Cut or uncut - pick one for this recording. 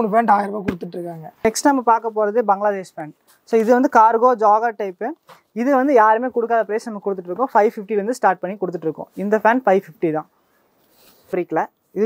cut